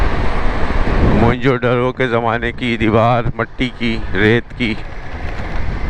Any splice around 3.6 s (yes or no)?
no